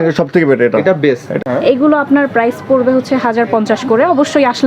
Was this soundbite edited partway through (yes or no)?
yes